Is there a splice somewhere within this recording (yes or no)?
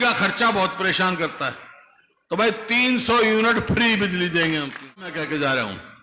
yes